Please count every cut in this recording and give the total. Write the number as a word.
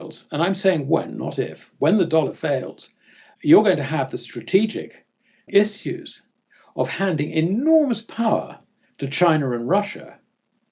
two